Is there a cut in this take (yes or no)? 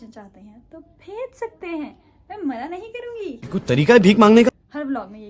no